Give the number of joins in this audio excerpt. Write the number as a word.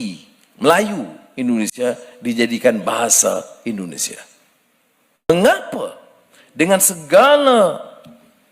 one